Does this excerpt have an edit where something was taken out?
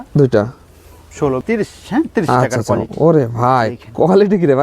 yes; 1 cut; at 1.4 s

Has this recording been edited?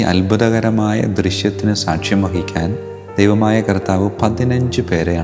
no; 0 cuts

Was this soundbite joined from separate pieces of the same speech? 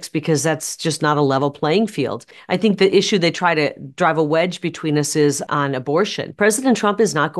yes; 2 cuts; at 2.3 s, 5.8 s

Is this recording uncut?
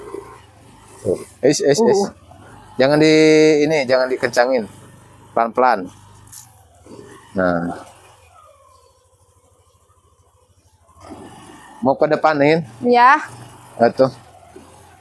yes; 0 cuts

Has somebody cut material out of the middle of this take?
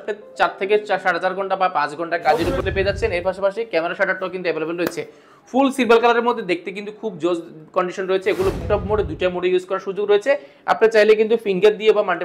yes; 2 cuts; at 2.6 s, 8.6 s

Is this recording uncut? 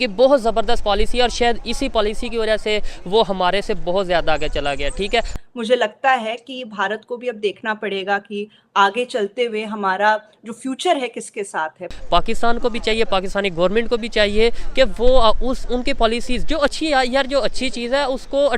no; 2 cuts; at 5.3 s, 11.9 s

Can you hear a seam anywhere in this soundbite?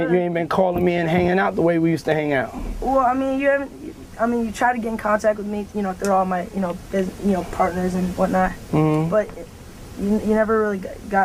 no; 0 cuts

